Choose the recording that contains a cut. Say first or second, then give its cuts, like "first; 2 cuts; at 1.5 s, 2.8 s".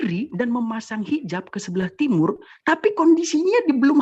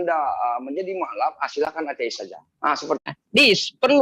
second; 1 cut; at 3.1 s